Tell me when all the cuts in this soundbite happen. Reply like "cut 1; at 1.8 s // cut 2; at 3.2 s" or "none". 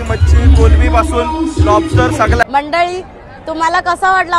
cut 1; at 2.4 s